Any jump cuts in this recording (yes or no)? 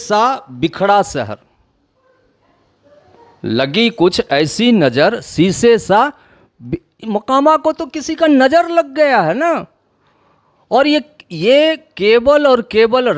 no